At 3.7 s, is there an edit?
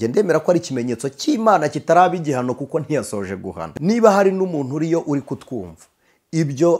yes; 1 cut; at 3.7 s

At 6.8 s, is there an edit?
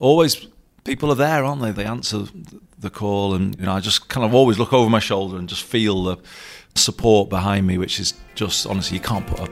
yes; 2 cuts; at 3.6 s, 6.8 s

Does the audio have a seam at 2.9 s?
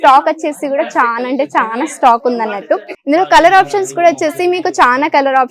yes; 1 cut; at 2.9 s

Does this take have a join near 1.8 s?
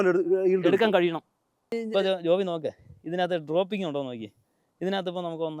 yes; 1 cut; at 1.8 s

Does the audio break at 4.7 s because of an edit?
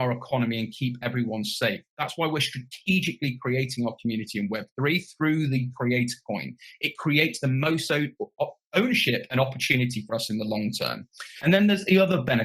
no; 1 cut; at 1.9 s

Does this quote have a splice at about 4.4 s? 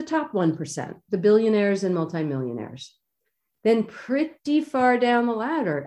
yes; 1 cut; at 4.4 s

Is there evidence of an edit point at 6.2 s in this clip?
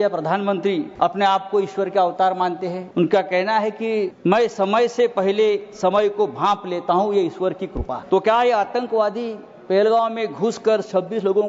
no; 4 cuts; at 0.9 s, 2.8 s, 4.1 s, 8.0 s

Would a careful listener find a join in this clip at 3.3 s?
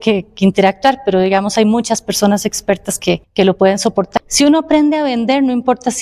yes; 2 cuts; at 3.3 s, 4.1 s

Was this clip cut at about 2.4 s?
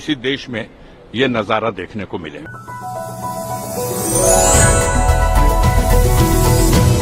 no; 0 cuts

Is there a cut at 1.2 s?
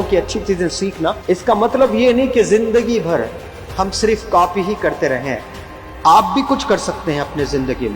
yes; 1 cut; at 1.2 s

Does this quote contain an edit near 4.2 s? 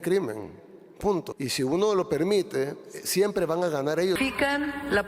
yes; 2 cuts; at 1.3 s, 4.2 s

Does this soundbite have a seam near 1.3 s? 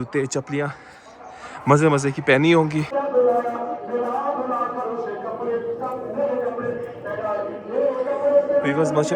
no; 1 cut; at 2.9 s

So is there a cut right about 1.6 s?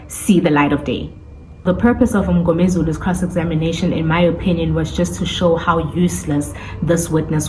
yes; 1 cut; at 1.6 s

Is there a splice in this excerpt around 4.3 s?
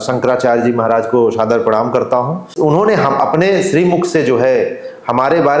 no; 1 cut; at 2.5 s

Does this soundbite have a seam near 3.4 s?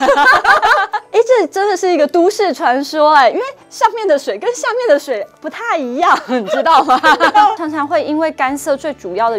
no; 2 cuts; at 1.0 s, 7.6 s

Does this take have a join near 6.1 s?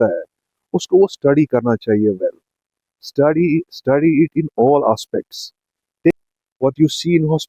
yes; 1 cut; at 6.1 s

